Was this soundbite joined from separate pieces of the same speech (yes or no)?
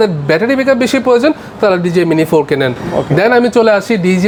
no